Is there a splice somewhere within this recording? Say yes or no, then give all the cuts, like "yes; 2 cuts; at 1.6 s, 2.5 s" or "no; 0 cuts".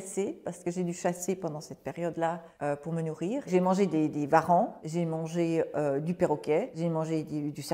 yes; 1 cut; at 6.7 s